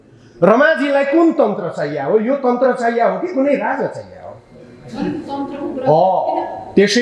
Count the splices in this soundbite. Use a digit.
0